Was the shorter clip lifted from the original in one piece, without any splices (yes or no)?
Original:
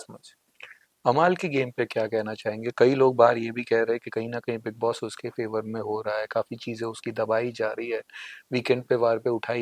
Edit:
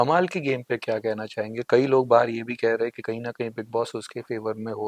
yes